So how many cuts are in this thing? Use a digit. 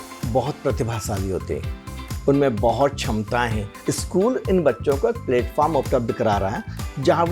1